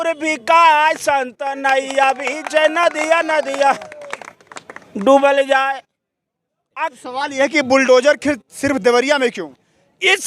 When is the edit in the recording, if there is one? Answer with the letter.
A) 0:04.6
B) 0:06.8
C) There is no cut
B